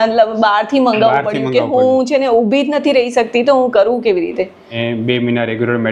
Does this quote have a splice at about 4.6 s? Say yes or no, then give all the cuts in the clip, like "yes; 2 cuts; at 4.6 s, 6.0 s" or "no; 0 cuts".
yes; 1 cut; at 4.6 s